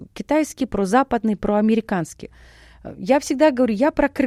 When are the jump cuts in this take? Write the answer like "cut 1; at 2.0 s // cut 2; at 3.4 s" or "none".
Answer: none